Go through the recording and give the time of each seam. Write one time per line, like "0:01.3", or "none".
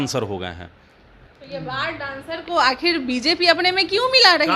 0:01.2